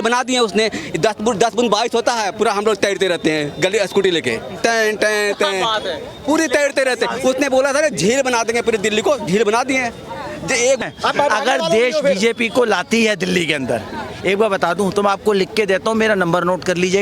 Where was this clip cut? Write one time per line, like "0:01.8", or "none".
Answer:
0:10.8